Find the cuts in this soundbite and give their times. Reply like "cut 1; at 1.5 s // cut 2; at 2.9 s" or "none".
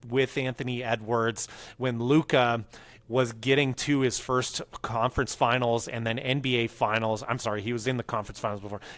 none